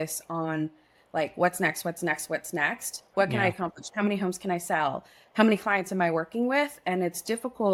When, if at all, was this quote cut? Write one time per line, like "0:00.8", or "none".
none